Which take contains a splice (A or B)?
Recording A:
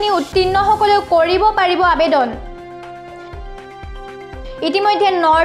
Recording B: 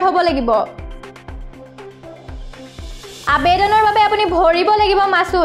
A